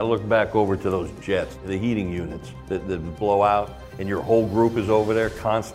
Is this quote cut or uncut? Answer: cut